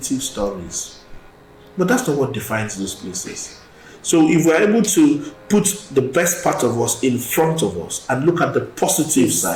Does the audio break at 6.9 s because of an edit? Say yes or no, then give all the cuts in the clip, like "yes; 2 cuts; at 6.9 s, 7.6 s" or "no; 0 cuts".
no; 0 cuts